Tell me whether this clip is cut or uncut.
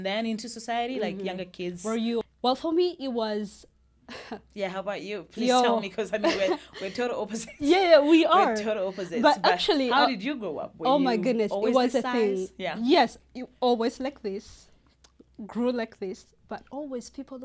cut